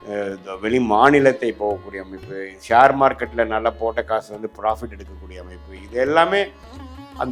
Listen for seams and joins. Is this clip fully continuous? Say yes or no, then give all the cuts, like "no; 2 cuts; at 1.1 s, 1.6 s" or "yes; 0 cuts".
yes; 0 cuts